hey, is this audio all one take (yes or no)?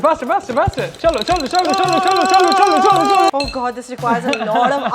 no